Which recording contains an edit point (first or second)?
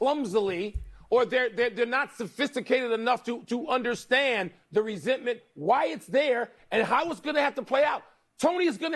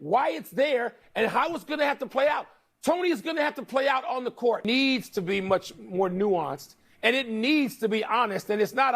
second